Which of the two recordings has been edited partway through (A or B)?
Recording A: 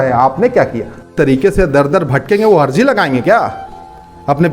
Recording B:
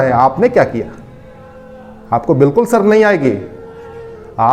A